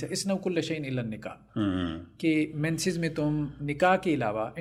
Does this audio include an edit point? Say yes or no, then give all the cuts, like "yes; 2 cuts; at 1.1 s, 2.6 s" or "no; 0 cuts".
no; 0 cuts